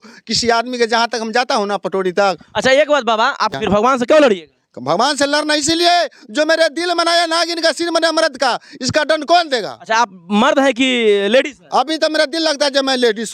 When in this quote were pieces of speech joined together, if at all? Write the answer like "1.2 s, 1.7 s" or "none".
3.5 s